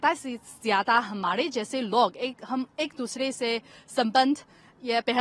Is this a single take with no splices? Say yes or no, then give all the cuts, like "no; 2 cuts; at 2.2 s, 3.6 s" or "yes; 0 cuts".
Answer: yes; 0 cuts